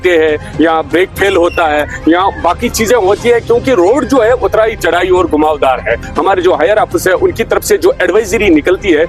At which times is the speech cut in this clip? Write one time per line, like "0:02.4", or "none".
0:06.1